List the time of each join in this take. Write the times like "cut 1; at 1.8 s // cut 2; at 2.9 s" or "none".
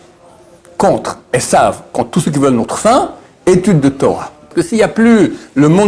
cut 1; at 4.5 s